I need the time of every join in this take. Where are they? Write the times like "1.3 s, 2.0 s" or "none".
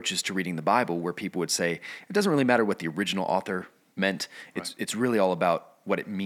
none